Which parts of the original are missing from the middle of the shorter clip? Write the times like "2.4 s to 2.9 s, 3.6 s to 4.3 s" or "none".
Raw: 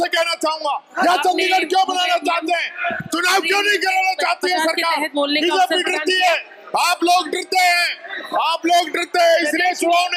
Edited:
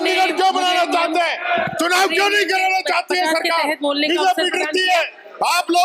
none